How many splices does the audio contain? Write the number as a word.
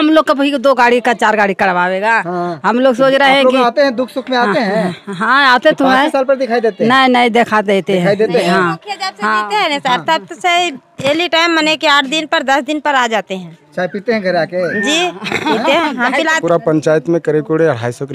one